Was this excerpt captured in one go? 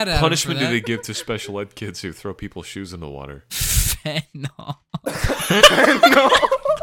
yes; 0 cuts

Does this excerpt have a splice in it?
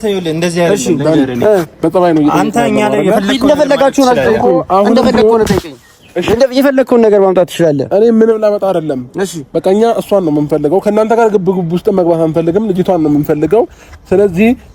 no; 0 cuts

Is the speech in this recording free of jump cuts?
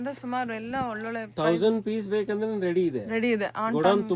yes; 0 cuts

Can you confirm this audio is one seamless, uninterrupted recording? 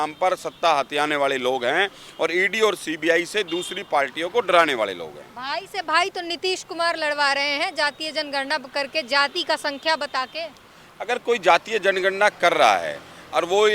yes; 0 cuts

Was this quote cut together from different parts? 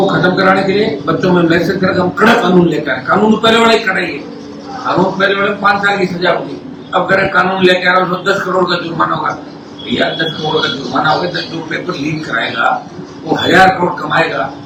no; 0 cuts

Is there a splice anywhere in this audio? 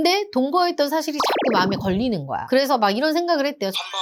no; 0 cuts

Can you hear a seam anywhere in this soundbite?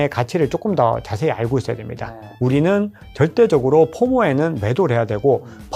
yes; 1 cut; at 2.3 s

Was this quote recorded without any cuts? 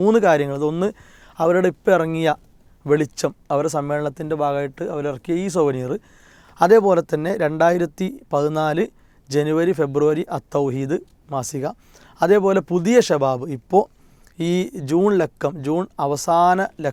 yes; 0 cuts

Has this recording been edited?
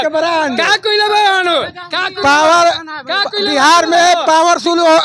no; 0 cuts

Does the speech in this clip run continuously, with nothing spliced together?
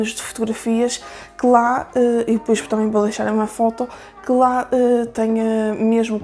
yes; 0 cuts

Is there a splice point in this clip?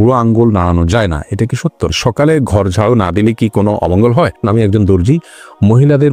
yes; 2 cuts; at 2.0 s, 4.4 s

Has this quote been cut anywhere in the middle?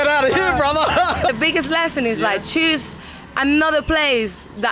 yes; 1 cut; at 1.3 s

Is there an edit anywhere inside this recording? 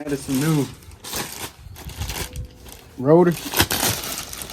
no; 0 cuts

